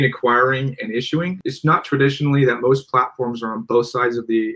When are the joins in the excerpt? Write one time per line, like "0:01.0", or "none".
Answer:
0:01.4